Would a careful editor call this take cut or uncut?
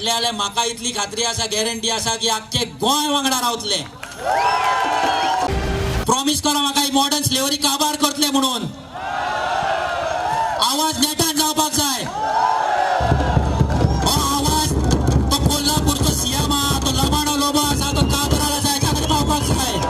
cut